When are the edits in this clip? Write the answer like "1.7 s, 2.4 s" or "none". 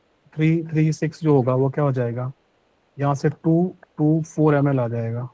none